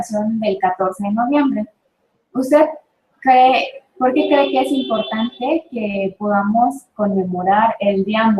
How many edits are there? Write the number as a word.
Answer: one